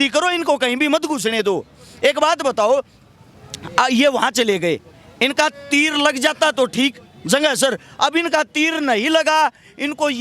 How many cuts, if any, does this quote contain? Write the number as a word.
zero